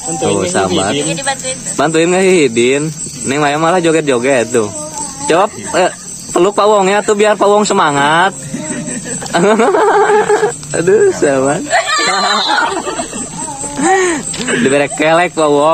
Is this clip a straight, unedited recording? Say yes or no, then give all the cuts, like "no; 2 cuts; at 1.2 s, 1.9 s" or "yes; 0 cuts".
yes; 0 cuts